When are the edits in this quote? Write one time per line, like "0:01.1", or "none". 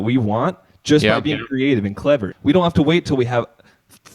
0:02.3